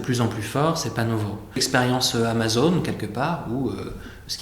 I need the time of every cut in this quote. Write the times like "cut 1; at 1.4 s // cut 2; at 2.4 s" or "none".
cut 1; at 1.6 s